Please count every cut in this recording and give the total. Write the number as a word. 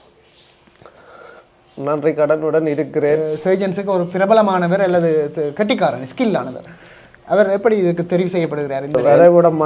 two